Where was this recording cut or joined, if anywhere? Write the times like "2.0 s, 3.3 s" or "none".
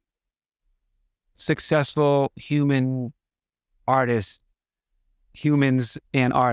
none